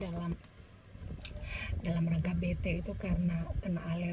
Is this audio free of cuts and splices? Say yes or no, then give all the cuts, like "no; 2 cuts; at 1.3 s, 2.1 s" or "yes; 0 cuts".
yes; 0 cuts